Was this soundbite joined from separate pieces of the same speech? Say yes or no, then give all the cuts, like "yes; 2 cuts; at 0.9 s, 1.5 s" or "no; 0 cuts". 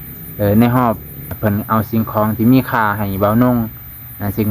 yes; 1 cut; at 1.1 s